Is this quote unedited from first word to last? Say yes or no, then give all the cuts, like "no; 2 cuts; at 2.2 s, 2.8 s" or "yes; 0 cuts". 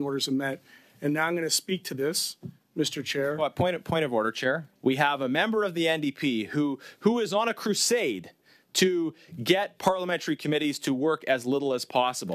no; 1 cut; at 4.7 s